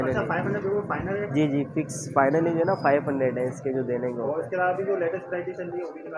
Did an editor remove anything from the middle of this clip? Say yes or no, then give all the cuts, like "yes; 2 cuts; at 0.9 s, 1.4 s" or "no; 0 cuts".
no; 0 cuts